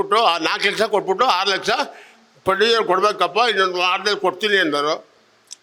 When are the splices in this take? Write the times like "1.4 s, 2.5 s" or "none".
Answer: none